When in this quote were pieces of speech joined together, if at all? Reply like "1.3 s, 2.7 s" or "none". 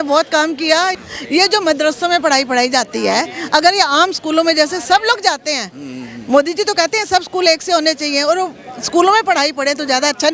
0.9 s

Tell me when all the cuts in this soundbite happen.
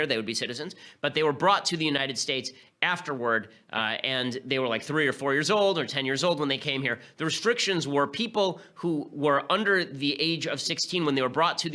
1.4 s

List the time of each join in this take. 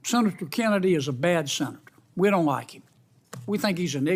none

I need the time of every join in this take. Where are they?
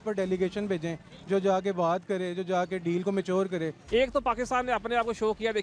3.8 s

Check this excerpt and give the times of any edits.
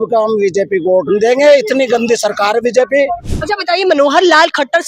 3.3 s

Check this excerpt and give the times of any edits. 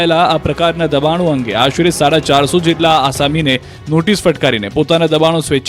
1.5 s

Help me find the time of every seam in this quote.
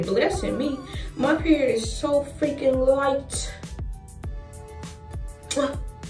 none

